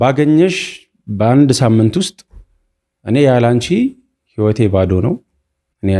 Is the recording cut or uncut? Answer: uncut